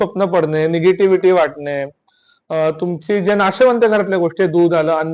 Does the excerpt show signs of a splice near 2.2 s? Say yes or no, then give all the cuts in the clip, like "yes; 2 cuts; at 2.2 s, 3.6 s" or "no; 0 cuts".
no; 0 cuts